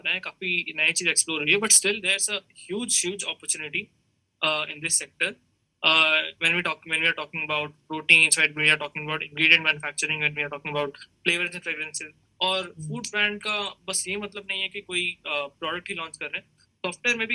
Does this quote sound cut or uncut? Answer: uncut